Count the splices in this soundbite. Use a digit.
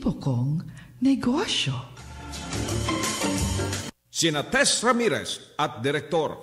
1